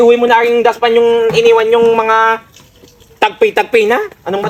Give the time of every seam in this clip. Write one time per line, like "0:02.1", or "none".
none